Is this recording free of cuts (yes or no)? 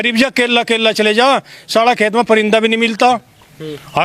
yes